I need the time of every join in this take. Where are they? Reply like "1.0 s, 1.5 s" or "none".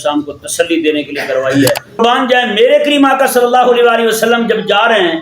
2.0 s